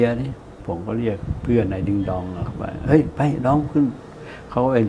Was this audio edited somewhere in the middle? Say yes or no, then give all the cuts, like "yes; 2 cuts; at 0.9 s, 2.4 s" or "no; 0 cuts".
yes; 1 cut; at 1.0 s